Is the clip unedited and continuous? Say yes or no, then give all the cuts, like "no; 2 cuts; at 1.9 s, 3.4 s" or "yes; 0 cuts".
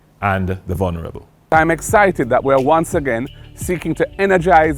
no; 1 cut; at 1.5 s